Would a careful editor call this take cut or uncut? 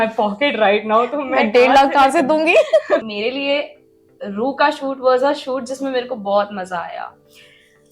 cut